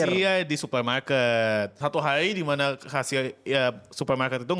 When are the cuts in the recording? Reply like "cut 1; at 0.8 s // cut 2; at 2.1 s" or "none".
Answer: cut 1; at 1.7 s